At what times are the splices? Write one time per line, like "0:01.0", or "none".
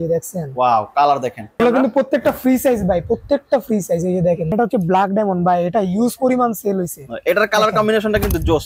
0:01.6
0:04.5